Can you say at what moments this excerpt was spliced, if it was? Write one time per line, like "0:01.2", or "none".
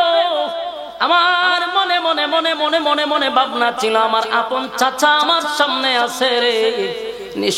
none